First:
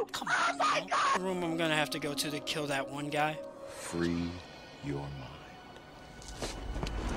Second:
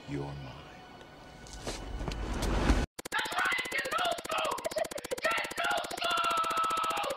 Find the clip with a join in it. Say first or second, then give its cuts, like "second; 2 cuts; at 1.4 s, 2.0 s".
first; 1 cut; at 1.2 s